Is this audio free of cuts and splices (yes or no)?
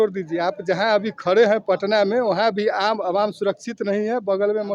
yes